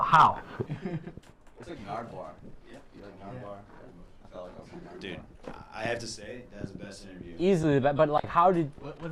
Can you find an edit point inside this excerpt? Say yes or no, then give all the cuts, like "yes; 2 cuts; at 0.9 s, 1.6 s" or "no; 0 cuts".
no; 0 cuts